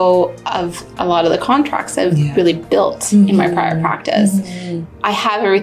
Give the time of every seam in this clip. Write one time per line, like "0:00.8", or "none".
0:04.7